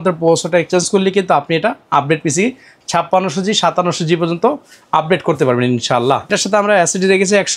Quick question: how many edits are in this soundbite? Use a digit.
1